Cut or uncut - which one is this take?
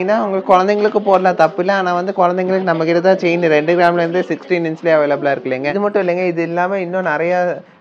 cut